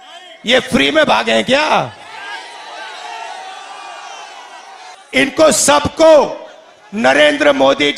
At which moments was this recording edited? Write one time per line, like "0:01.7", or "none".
0:04.9